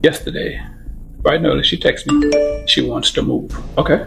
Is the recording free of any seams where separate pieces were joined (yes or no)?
yes